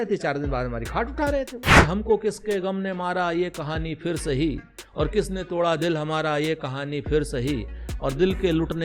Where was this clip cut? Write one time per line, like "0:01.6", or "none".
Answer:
0:01.7